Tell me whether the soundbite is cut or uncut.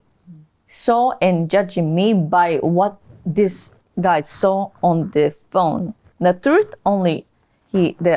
cut